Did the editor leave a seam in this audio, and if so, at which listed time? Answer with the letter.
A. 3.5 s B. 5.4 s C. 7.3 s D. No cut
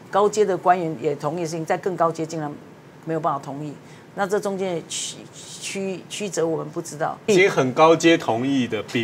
C